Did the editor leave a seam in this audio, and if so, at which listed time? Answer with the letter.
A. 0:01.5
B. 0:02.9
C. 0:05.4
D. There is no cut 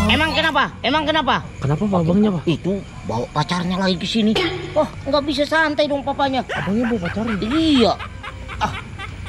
A